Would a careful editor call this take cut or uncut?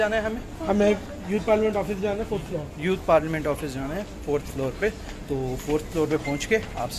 uncut